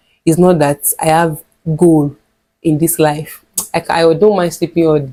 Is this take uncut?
yes; 0 cuts

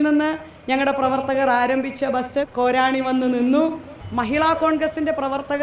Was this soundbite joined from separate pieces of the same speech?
yes; 1 cut; at 3.9 s

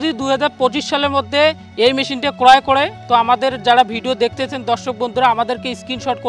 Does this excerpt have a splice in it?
no; 0 cuts

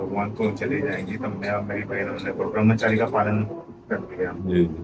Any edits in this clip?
no; 0 cuts

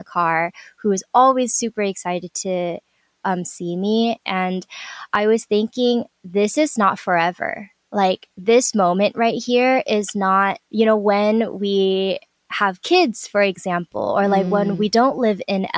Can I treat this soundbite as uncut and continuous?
yes; 0 cuts

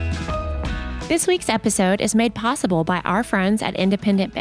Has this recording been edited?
yes; 1 cut; at 1.0 s

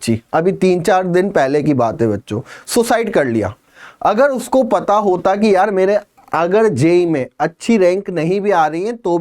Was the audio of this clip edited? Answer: no; 0 cuts

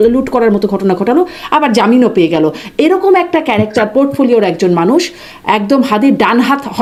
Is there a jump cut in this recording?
no; 0 cuts

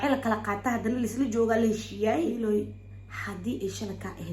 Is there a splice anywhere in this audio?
yes; 1 cut; at 2.3 s

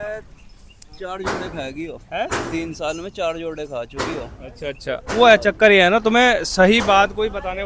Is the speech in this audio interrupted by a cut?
no; 0 cuts

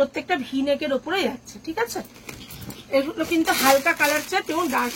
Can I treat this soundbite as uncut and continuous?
yes; 0 cuts

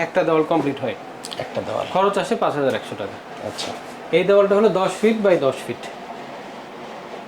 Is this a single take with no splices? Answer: yes; 0 cuts

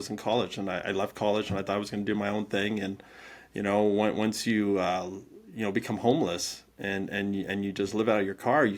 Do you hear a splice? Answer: no; 0 cuts

